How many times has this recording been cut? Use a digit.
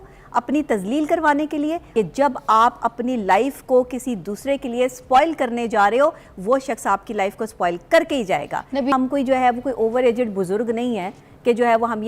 2